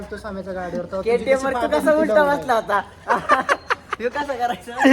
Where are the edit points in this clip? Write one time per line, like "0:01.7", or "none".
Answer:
none